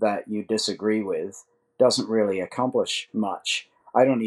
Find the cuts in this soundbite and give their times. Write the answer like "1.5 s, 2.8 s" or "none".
none